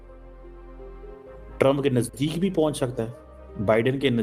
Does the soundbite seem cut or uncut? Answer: uncut